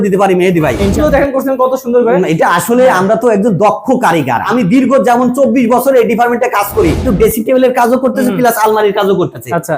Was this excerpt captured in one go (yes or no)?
no